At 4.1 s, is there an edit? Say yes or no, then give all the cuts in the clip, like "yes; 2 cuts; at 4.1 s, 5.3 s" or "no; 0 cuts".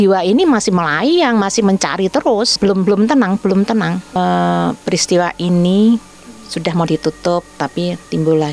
yes; 2 cuts; at 2.6 s, 4.1 s